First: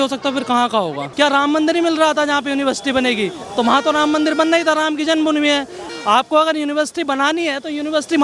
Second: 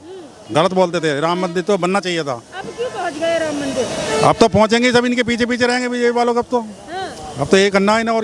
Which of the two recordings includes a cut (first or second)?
first